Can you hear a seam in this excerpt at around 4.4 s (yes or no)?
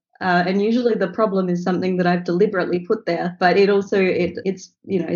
yes